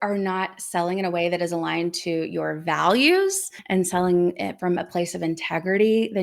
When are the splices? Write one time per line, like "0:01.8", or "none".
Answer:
0:03.5